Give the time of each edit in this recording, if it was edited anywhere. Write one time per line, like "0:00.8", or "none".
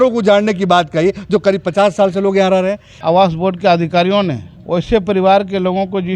0:02.9
0:04.5

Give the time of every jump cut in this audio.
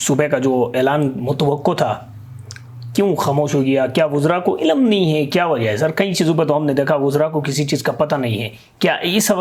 none

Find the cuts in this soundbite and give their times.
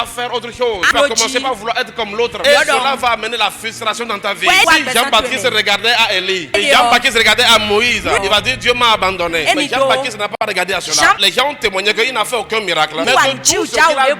0:00.9
0:02.4
0:04.6
0:06.6
0:08.2
0:09.6
0:11.2
0:13.0

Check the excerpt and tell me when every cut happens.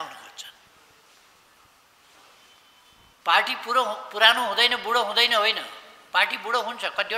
none

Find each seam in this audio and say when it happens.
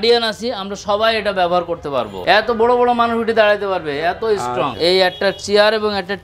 0:02.2
0:04.7

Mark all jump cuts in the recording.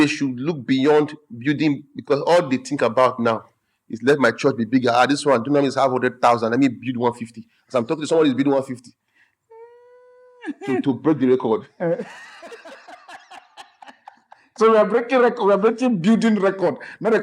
none

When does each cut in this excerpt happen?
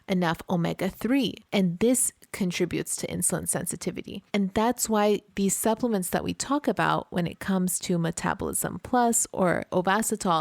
0:01.4
0:04.2
0:05.3

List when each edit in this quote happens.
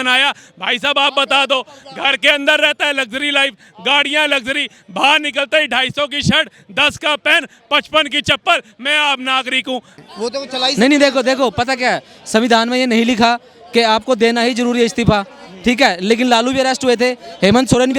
0:09.9

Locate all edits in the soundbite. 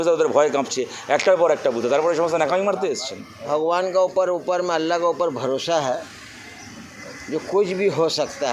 0:03.4

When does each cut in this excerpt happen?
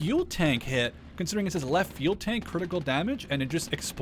none

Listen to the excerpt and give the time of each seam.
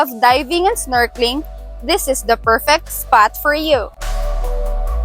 0:04.0

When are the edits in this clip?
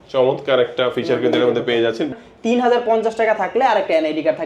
0:02.1

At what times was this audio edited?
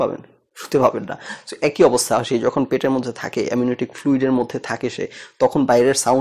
none

